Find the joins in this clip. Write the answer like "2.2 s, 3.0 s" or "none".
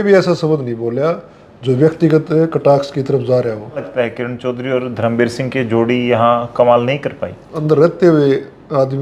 3.9 s, 7.5 s